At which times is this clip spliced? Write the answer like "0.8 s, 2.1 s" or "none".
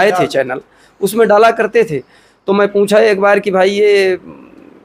none